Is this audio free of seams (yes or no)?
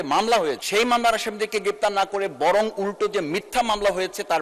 yes